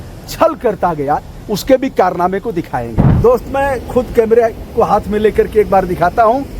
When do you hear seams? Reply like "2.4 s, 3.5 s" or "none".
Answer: 3.0 s

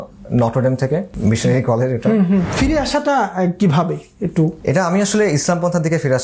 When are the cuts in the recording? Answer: 1.1 s, 2.5 s, 4.6 s

